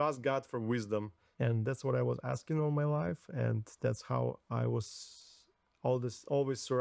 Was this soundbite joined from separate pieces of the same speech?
yes; 1 cut; at 1.2 s

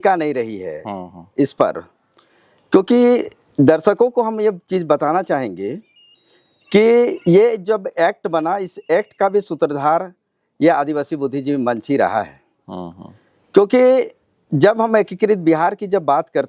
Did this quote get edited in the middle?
no; 0 cuts

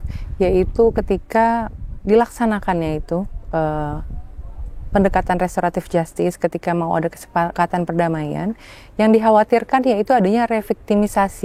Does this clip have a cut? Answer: yes; 1 cut; at 7.5 s

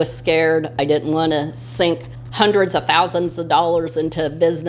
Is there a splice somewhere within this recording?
yes; 1 cut; at 2.2 s

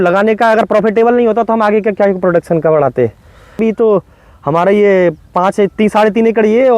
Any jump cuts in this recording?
yes; 1 cut; at 3.6 s

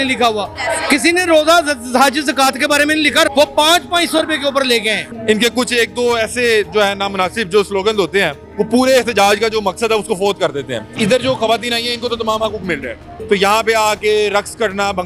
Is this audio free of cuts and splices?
no; 4 cuts; at 3.3 s, 5.1 s, 10.9 s, 13.1 s

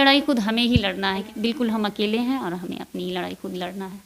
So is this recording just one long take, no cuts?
no; 1 cut; at 1.3 s

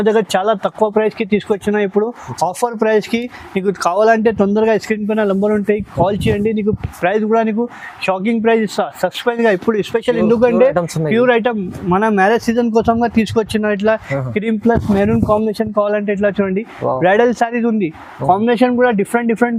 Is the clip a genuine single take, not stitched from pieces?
yes; 0 cuts

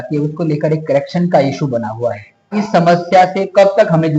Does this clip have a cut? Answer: yes; 1 cut; at 2.6 s

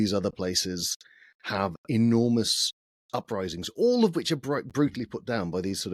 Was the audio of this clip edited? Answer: no; 0 cuts

